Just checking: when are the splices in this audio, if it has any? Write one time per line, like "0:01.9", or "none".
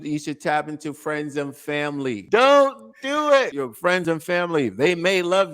0:02.2
0:04.0